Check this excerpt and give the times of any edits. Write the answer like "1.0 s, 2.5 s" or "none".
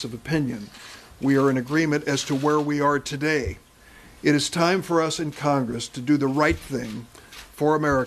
1.5 s